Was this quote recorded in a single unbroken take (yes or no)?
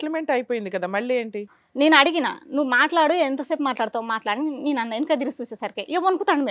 no